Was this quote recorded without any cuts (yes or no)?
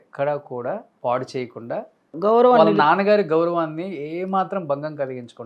no